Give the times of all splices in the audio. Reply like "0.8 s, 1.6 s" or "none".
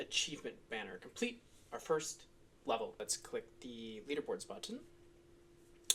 3.1 s